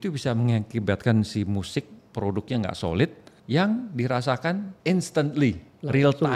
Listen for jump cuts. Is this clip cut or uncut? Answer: cut